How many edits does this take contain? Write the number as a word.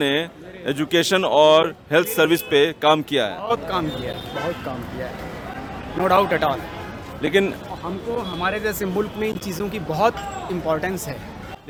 zero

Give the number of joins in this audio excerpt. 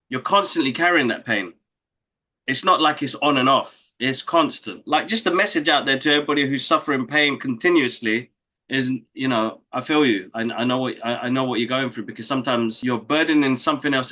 two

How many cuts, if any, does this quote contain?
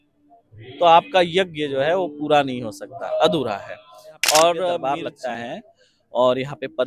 one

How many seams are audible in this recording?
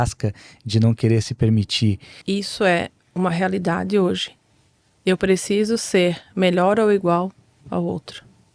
one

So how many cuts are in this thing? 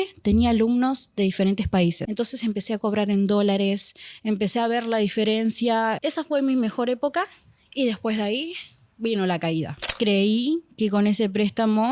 three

